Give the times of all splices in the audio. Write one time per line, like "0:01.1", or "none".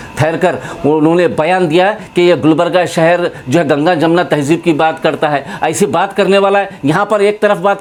none